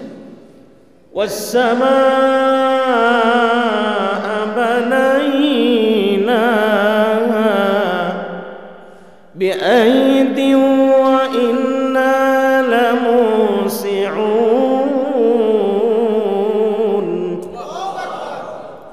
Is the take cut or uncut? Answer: uncut